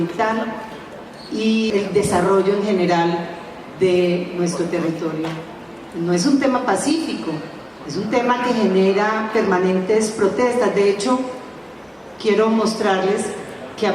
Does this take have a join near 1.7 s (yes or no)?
yes